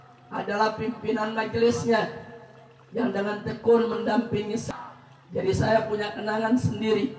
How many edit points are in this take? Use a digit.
1